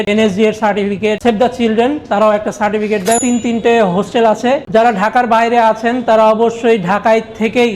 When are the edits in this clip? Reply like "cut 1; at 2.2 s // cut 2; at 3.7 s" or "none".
cut 1; at 1.2 s // cut 2; at 3.2 s